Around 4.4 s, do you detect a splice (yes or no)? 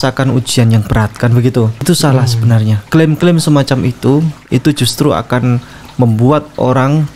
no